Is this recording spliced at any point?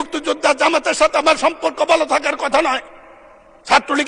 no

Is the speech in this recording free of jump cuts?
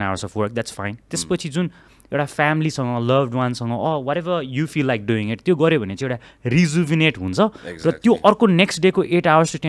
yes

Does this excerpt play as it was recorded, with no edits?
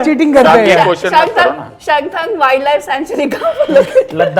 yes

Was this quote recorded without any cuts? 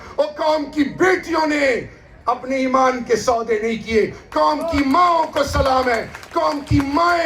yes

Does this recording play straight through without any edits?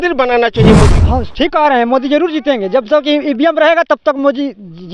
no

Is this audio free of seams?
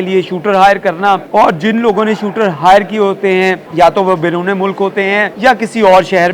no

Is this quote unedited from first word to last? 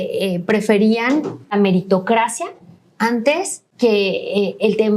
no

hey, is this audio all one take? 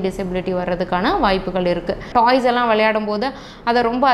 no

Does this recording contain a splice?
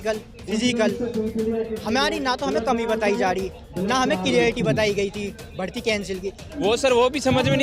yes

